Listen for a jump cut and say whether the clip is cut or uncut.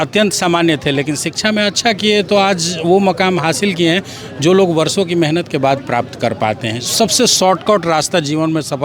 uncut